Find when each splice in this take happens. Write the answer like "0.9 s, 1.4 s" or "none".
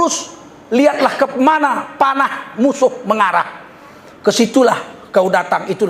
none